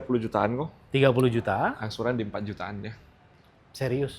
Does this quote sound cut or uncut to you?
uncut